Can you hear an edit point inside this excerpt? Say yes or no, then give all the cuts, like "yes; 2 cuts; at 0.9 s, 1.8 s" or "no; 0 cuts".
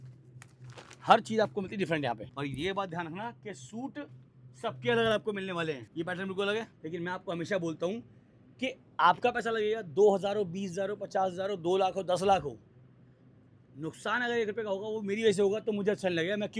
yes; 3 cuts; at 2.3 s, 5.9 s, 6.8 s